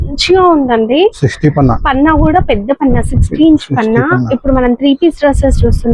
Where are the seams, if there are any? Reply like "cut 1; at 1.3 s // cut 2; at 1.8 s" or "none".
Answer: none

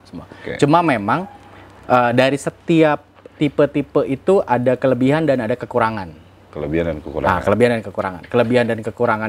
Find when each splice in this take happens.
none

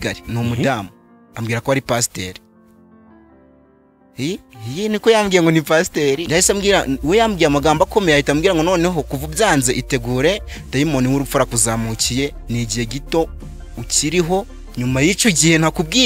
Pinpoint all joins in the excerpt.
cut 1; at 6.2 s

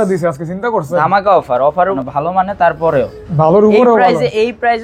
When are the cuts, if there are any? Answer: cut 1; at 1.9 s

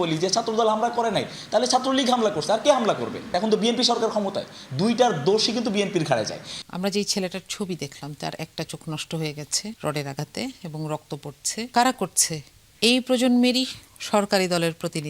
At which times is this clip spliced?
cut 1; at 3.3 s // cut 2; at 6.6 s // cut 3; at 9.8 s // cut 4; at 11.7 s

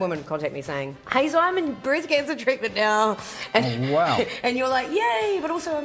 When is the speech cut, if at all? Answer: cut 1; at 1.0 s

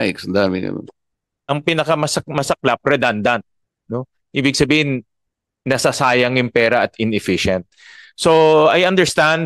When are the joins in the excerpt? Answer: cut 1; at 1.3 s

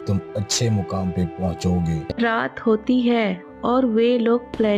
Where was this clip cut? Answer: cut 1; at 2.1 s

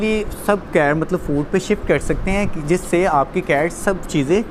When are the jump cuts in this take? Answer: none

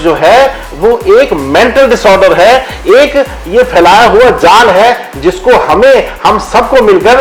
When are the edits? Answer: none

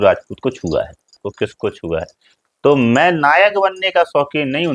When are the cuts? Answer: cut 1; at 1.2 s

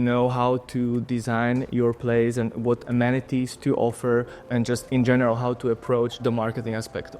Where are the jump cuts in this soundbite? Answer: cut 1; at 3.5 s // cut 2; at 6.2 s

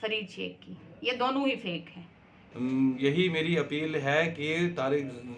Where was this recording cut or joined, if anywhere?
cut 1; at 2.4 s

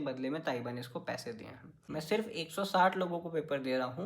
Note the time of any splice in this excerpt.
cut 1; at 1.9 s

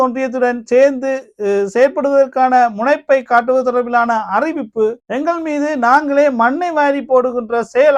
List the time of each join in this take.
none

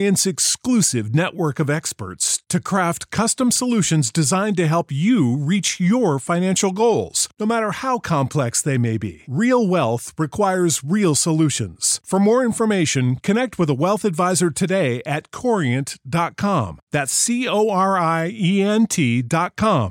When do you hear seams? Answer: none

